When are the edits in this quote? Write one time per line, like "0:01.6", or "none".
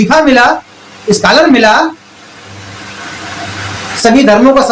none